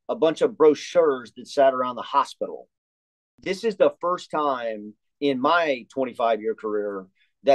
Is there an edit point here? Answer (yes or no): yes